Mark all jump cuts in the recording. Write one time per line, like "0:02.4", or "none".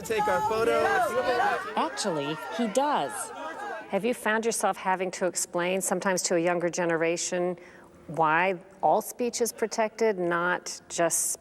0:03.6